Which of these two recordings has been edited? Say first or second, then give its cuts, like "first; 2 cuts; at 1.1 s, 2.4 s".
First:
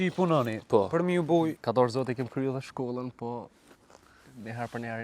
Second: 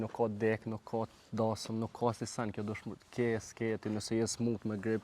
first; 1 cut; at 1.6 s